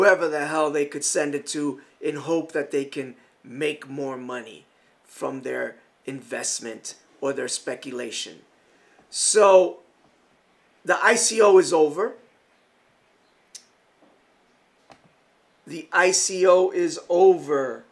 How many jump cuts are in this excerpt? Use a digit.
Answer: 1